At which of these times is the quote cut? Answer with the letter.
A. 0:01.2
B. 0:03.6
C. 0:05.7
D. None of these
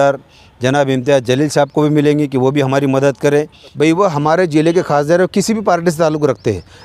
B